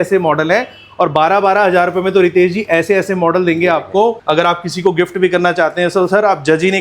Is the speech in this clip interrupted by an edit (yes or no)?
yes